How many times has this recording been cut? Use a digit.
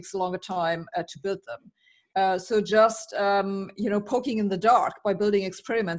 0